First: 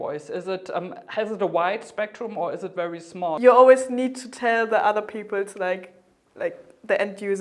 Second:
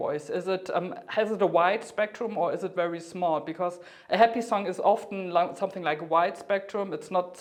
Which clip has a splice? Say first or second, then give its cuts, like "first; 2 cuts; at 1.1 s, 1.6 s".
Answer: first; 1 cut; at 3.4 s